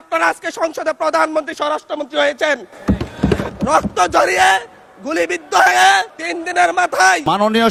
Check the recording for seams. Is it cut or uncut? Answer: uncut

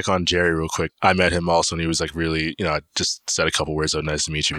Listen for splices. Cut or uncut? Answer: cut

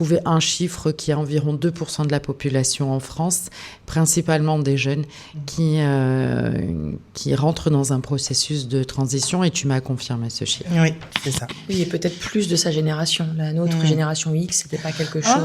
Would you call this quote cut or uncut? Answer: uncut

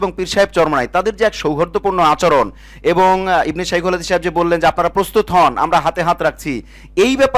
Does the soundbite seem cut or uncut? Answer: uncut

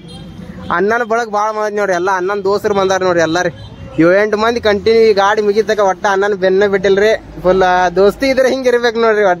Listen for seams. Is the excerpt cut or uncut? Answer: uncut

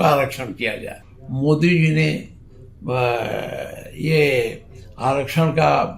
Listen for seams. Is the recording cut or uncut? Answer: cut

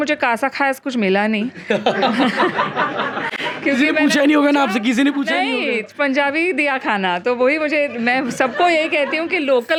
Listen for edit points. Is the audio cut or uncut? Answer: uncut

